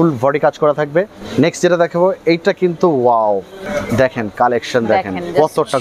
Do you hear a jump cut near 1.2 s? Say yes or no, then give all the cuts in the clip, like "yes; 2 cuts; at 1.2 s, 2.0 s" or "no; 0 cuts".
yes; 2 cuts; at 1.2 s, 3.6 s